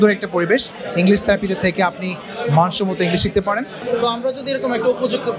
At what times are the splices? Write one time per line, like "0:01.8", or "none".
0:03.8